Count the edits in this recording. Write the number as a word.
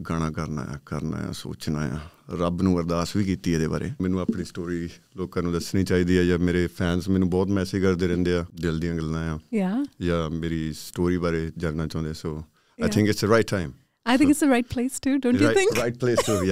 two